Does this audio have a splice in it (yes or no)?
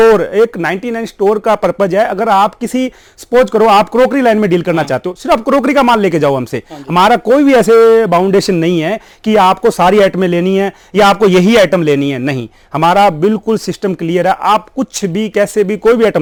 no